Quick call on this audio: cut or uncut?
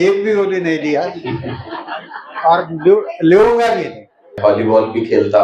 cut